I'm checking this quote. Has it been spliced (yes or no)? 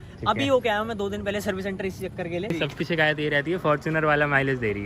yes